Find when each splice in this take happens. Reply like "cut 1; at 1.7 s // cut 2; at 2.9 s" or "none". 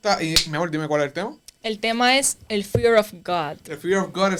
none

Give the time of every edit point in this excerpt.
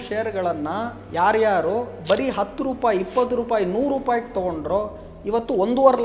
none

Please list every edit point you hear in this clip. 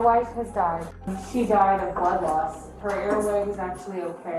cut 1; at 1.0 s // cut 2; at 2.7 s

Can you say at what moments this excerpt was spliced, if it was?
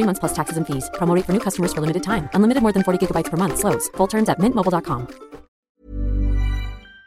cut 1; at 5.8 s

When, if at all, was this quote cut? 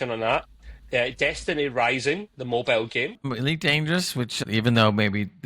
cut 1; at 3.2 s // cut 2; at 4.4 s

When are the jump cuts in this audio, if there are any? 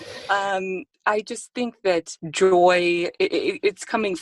cut 1; at 0.9 s // cut 2; at 2.2 s

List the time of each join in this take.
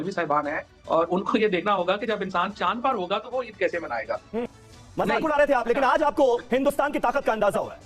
cut 1; at 4.5 s

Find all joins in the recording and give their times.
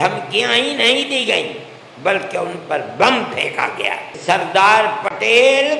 cut 1; at 4.1 s

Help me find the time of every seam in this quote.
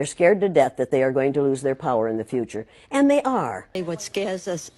cut 1; at 3.8 s

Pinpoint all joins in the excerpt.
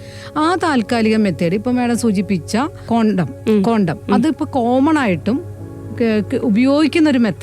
cut 1; at 2.8 s

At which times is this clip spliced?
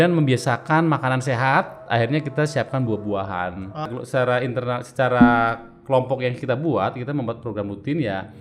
cut 1; at 3.9 s

